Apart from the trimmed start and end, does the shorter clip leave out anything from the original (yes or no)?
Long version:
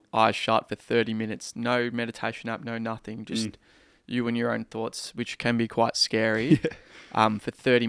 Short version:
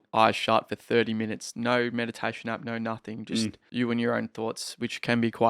yes